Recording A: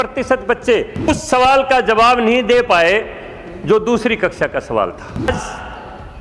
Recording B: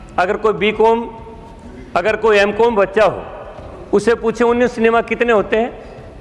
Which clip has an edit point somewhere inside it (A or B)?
A